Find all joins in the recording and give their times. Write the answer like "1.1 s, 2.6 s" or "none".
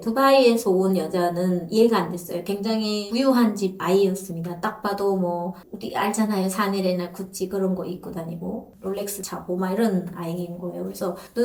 none